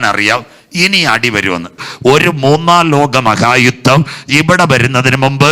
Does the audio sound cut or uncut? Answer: cut